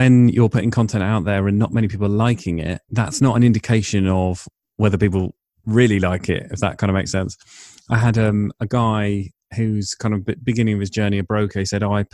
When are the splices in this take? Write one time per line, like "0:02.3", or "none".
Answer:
0:02.8